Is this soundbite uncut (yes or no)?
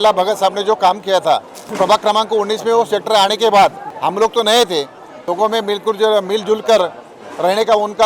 no